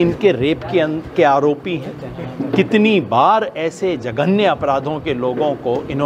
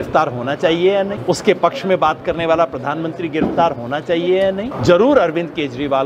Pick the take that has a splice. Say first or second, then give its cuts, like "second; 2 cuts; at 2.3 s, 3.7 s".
second; 2 cuts; at 1.2 s, 4.7 s